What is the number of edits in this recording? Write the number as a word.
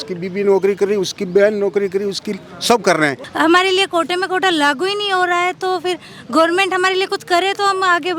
one